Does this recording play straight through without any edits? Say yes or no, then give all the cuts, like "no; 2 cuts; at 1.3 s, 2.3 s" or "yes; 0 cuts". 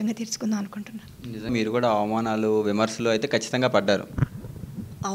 no; 1 cut; at 1.5 s